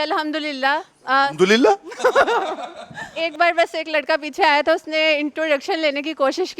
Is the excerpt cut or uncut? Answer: cut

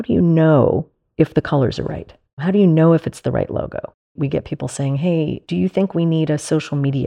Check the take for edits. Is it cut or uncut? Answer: cut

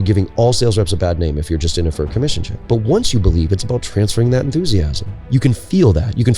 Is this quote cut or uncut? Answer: cut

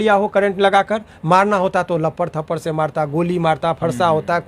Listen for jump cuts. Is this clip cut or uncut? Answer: uncut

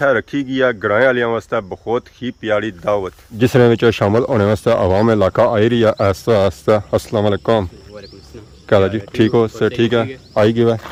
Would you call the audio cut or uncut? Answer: uncut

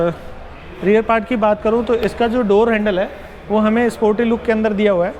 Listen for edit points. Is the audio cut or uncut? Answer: uncut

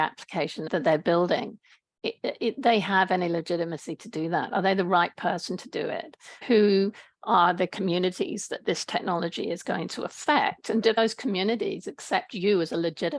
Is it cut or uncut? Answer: cut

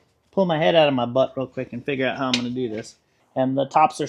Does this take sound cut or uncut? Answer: cut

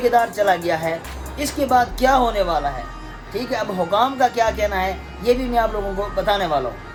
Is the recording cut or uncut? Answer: uncut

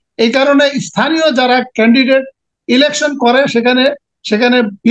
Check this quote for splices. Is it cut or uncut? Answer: uncut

